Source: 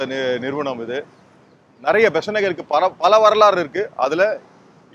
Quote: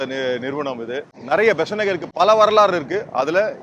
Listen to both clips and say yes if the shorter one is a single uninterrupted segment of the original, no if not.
no